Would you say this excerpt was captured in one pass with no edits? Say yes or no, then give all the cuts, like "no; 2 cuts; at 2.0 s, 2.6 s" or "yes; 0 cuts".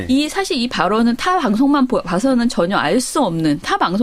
yes; 0 cuts